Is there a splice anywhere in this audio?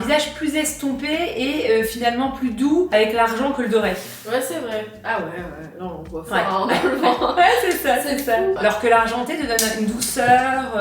no; 0 cuts

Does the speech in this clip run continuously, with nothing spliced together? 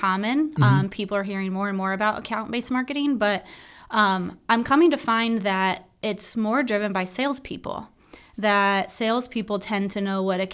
yes; 0 cuts

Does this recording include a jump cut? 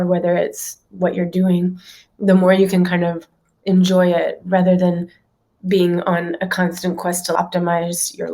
yes; 1 cut; at 7.3 s

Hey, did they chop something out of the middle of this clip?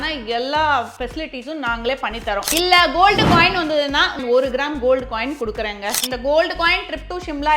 yes; 3 cuts; at 2.5 s, 4.2 s, 6.0 s

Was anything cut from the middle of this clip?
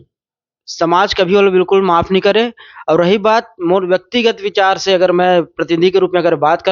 no; 0 cuts

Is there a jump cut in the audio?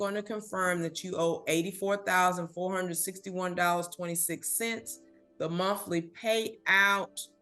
no; 0 cuts

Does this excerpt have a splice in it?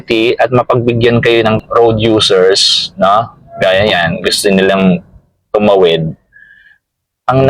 yes; 1 cut; at 1.6 s

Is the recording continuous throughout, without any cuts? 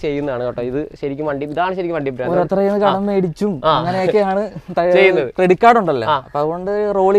yes; 0 cuts

